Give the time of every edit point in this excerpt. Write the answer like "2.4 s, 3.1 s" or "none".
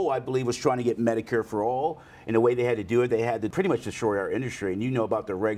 3.5 s